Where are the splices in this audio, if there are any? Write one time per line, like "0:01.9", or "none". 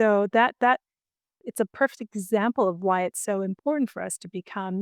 0:01.4